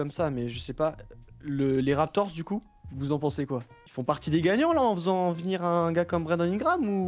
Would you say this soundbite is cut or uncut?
cut